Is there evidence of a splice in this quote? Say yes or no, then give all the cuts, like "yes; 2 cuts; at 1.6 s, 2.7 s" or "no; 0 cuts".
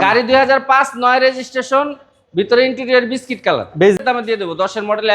yes; 1 cut; at 4.0 s